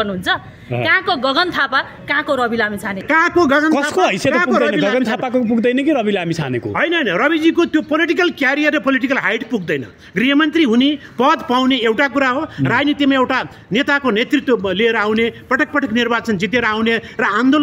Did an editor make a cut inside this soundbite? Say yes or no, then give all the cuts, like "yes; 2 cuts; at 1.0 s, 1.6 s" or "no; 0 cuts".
yes; 1 cut; at 3.0 s